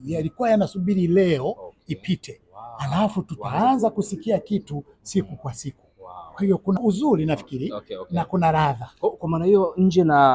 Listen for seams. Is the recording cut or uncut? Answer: cut